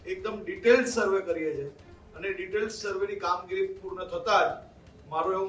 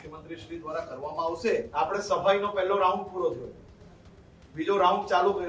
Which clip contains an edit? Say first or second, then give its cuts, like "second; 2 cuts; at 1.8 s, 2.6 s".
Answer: second; 1 cut; at 1.7 s